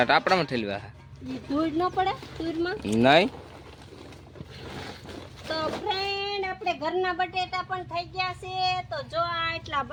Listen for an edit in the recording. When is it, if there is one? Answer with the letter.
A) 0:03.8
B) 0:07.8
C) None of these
C